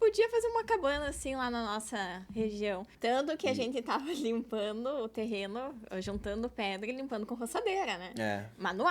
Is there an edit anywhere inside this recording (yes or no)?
yes